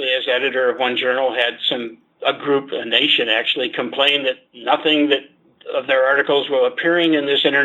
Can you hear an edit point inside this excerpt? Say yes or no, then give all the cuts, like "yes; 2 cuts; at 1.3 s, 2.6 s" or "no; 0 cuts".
no; 0 cuts